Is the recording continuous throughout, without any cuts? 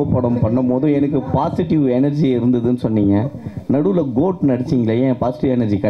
yes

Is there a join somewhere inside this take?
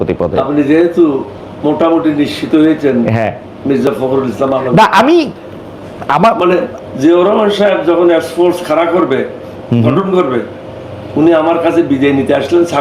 yes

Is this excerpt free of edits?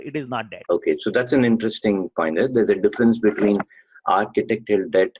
yes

